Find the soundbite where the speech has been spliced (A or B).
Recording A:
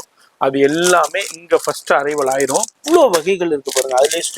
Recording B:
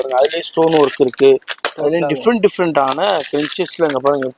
A